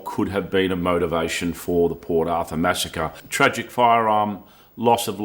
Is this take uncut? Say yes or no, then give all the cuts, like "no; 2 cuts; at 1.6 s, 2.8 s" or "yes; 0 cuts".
no; 1 cut; at 3.2 s